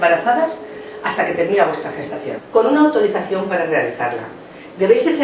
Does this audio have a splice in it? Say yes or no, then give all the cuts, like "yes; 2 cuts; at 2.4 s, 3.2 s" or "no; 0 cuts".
no; 0 cuts